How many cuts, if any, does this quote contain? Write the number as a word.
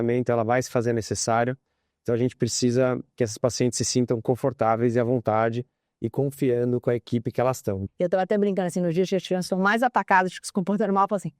one